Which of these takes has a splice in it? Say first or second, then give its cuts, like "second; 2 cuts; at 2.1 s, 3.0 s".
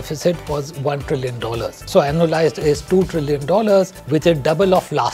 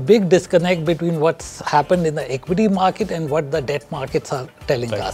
first; 2 cuts; at 1.9 s, 4.0 s